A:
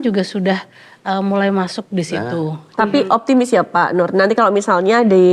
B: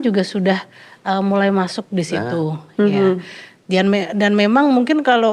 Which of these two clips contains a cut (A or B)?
A